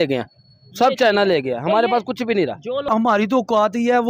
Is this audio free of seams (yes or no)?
no